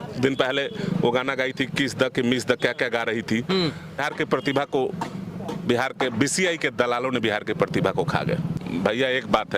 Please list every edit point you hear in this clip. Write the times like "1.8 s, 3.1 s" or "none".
4.1 s, 8.5 s